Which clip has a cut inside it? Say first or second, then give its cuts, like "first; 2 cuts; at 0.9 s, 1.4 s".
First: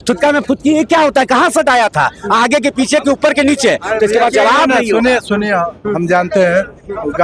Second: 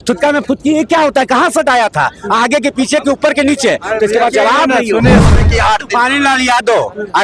second; 1 cut; at 5.4 s